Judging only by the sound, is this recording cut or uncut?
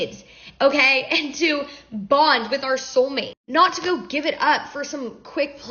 uncut